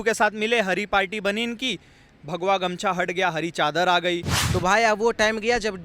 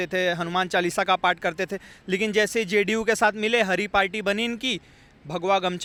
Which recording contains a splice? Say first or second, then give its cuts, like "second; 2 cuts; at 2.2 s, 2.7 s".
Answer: first; 1 cut; at 4.4 s